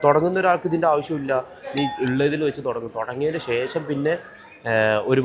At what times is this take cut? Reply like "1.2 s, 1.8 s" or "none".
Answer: none

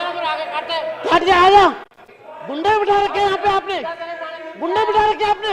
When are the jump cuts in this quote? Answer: none

